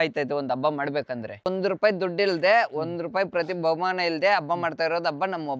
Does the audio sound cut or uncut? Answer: cut